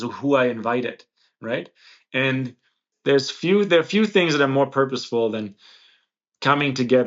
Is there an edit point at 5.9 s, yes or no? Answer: no